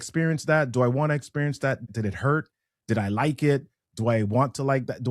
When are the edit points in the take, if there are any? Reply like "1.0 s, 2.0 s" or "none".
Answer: 1.9 s